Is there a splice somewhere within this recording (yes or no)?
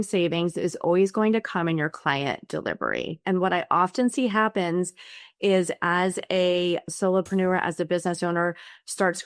yes